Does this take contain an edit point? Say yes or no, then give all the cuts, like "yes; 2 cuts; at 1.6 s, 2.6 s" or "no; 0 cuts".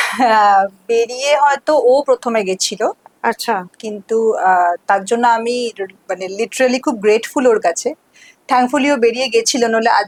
no; 0 cuts